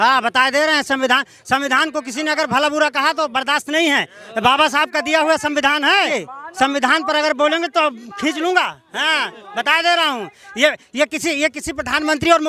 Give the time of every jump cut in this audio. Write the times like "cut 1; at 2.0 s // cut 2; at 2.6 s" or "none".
none